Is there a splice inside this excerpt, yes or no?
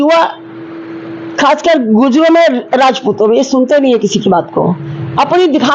no